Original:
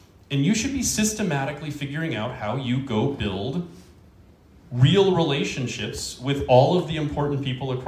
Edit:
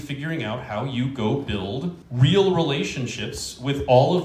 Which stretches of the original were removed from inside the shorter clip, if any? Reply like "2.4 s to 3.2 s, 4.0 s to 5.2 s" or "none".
3.8 s to 4.6 s